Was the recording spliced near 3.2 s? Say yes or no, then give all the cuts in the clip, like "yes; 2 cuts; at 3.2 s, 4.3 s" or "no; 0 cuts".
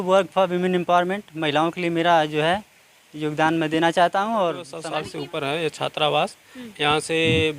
no; 1 cut; at 4.7 s